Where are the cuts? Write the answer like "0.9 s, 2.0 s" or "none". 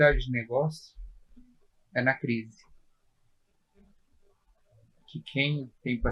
none